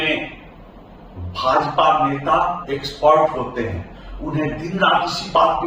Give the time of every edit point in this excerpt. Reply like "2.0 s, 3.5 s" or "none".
none